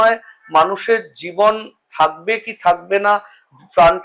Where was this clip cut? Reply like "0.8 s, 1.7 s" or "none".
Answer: none

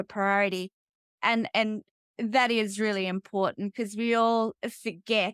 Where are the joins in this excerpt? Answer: none

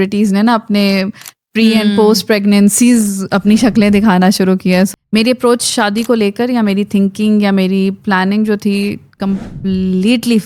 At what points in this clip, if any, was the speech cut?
4.9 s

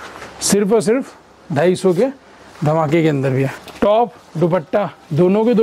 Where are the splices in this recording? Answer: 3.6 s

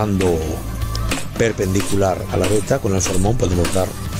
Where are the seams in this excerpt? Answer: none

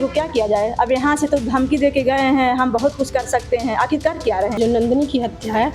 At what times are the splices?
4.6 s

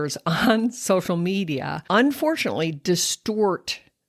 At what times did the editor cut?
1.7 s

